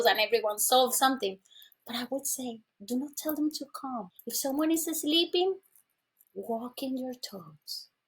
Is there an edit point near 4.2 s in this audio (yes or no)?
yes